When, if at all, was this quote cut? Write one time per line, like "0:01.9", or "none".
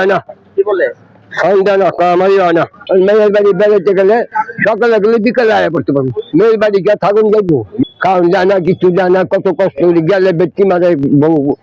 0:02.8
0:07.8